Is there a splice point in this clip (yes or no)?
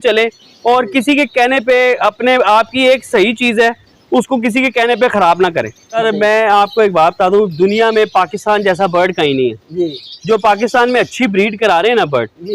yes